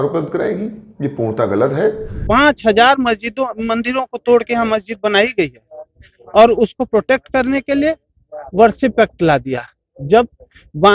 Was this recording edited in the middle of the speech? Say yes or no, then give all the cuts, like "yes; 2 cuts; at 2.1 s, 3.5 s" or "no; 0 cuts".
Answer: yes; 1 cut; at 2.1 s